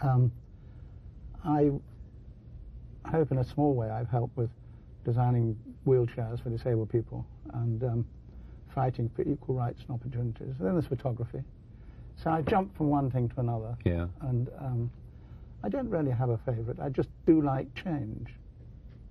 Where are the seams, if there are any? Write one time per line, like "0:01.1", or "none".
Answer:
0:15.9